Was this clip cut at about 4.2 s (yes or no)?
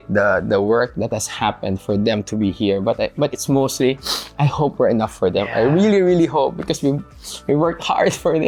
no